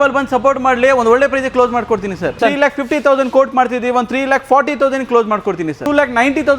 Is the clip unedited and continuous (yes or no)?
no